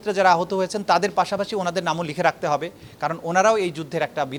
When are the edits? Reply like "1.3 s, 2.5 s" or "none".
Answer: none